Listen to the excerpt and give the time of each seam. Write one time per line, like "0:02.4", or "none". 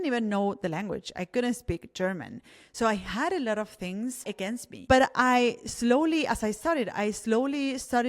0:04.7

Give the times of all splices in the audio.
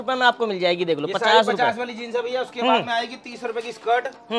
none

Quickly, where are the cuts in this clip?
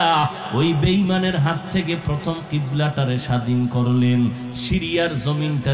none

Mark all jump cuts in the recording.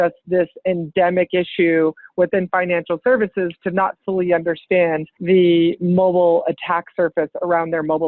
0:05.1

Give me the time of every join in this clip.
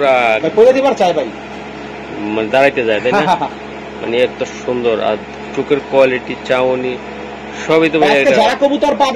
none

